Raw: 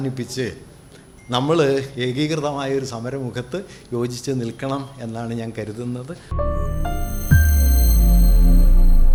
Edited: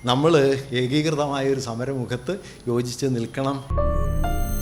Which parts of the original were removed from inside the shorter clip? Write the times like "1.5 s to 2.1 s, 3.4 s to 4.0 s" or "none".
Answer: 4.9 s to 6.3 s